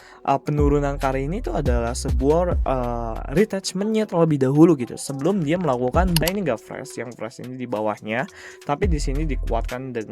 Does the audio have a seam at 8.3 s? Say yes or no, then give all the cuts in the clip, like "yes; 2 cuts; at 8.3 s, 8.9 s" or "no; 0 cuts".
no; 1 cut; at 6.2 s